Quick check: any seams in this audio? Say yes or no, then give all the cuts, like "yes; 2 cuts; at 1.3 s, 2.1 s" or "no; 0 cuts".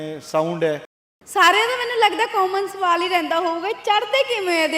yes; 1 cut; at 1.1 s